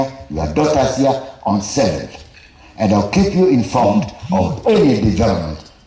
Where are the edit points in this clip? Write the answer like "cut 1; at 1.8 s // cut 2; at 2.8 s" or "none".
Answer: none